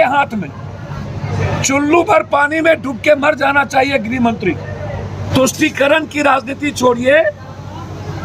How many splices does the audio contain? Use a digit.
2